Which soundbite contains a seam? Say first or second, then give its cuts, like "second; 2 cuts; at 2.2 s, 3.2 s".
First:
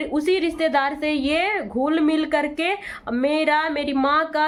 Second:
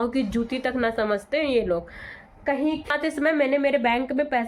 second; 1 cut; at 2.9 s